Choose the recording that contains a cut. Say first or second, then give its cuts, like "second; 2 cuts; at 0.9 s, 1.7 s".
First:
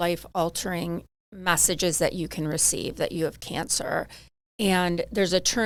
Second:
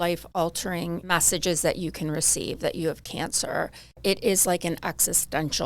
second; 2 cuts; at 1.0 s, 4.0 s